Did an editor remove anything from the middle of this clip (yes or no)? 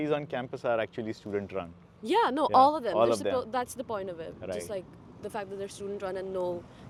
no